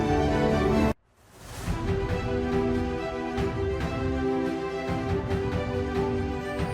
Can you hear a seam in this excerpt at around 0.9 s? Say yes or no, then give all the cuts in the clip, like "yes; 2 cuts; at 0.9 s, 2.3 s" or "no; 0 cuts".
yes; 1 cut; at 0.9 s